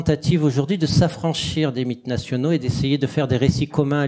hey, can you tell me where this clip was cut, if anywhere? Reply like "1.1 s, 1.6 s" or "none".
none